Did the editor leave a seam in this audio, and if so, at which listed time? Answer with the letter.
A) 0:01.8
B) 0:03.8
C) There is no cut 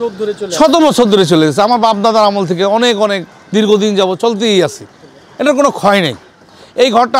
C